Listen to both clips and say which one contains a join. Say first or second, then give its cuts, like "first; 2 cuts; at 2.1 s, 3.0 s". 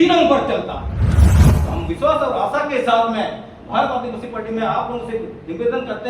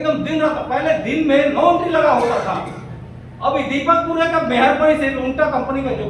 first; 1 cut; at 1.3 s